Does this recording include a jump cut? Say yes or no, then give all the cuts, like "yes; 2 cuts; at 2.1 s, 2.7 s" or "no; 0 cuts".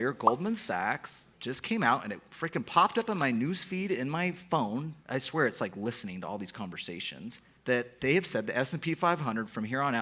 yes; 2 cuts; at 5.0 s, 7.5 s